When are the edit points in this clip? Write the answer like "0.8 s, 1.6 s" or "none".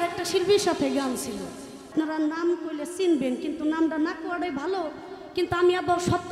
1.8 s